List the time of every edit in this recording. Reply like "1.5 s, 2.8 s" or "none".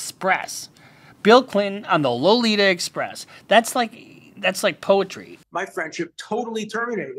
5.3 s